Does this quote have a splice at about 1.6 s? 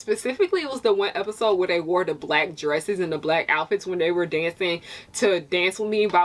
no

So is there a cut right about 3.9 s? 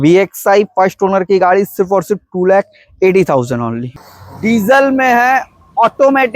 yes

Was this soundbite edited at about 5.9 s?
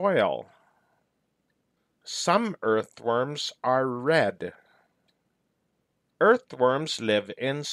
yes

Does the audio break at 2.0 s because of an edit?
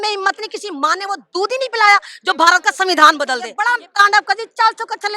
no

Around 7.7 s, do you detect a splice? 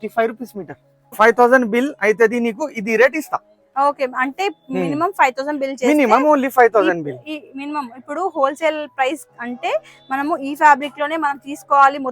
no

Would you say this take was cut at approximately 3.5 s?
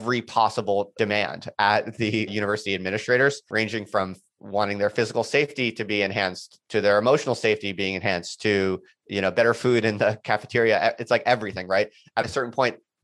yes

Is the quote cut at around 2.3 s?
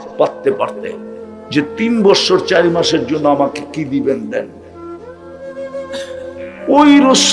no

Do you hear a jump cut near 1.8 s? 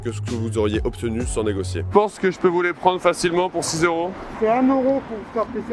yes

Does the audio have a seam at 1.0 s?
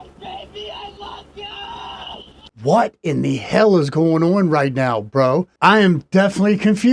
no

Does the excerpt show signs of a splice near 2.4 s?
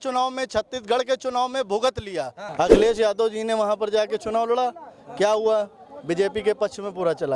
yes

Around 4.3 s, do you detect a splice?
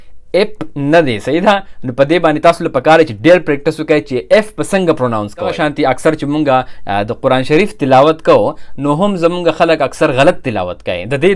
no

